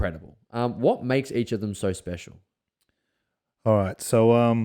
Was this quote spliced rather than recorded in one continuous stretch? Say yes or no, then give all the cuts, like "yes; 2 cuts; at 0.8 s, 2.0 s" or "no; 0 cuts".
no; 0 cuts